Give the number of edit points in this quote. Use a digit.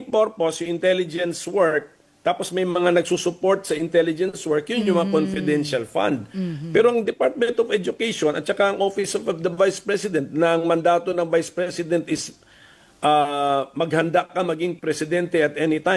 0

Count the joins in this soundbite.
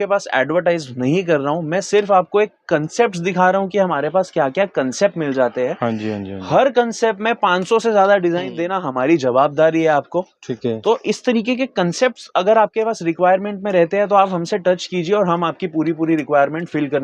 0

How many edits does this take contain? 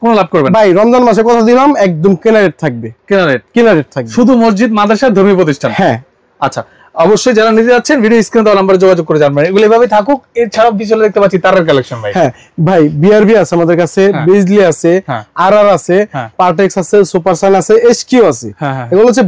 0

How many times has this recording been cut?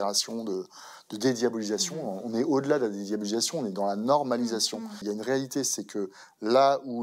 1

